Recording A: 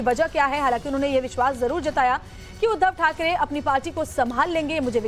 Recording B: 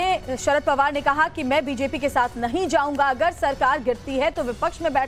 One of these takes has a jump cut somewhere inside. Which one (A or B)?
B